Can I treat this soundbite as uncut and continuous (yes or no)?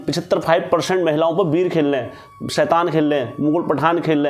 yes